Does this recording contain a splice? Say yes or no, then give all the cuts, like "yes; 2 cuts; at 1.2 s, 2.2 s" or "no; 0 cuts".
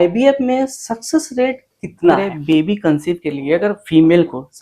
yes; 1 cut; at 2.3 s